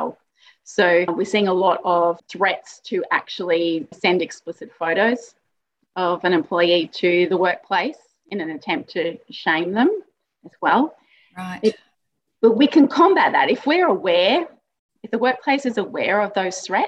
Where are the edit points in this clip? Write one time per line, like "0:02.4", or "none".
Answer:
0:03.9